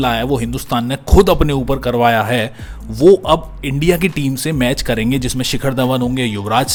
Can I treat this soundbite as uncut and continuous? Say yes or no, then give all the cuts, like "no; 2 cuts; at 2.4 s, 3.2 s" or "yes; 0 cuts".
yes; 0 cuts